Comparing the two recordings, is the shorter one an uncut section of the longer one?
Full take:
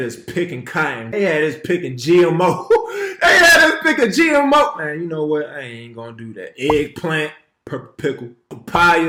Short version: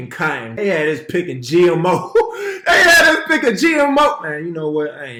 yes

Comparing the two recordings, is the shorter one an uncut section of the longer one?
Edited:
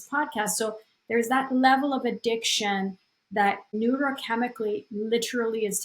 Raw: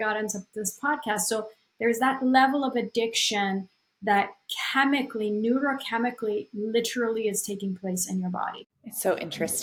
no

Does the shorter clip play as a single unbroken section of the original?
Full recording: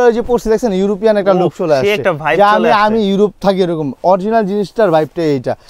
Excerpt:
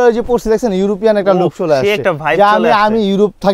yes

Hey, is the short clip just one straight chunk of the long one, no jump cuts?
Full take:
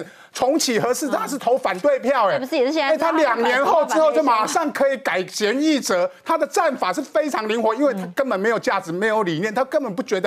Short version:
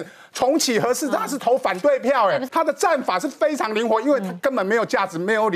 no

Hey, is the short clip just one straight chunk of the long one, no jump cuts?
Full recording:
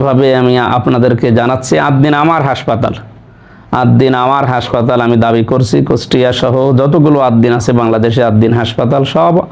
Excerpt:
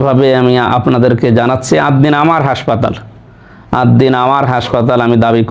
yes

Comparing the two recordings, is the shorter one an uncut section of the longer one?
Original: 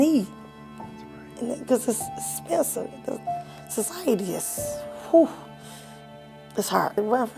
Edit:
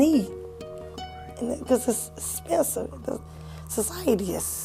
yes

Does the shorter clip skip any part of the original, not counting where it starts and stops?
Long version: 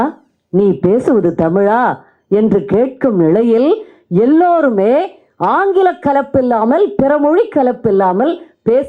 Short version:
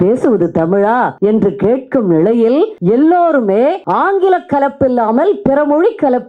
yes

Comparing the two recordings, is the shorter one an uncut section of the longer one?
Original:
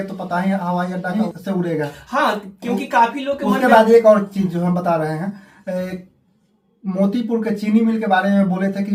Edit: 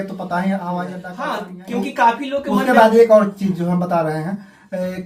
no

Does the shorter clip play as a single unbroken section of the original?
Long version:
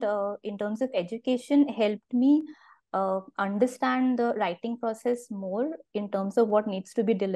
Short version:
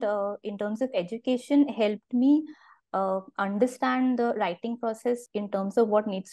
no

